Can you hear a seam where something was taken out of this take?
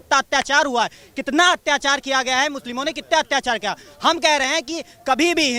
no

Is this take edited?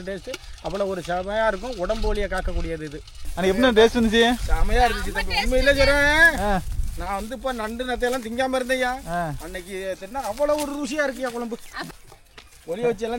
yes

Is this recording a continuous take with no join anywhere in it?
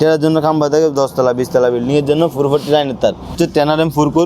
no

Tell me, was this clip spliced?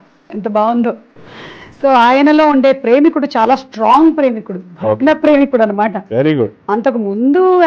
yes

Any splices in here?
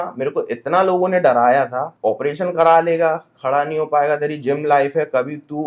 yes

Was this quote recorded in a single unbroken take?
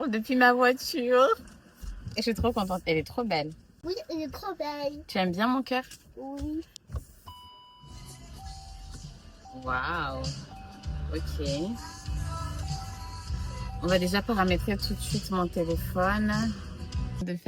yes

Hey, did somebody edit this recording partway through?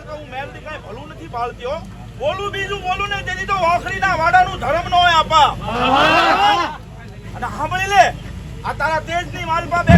no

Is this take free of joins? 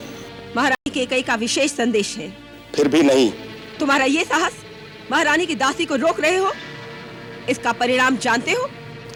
yes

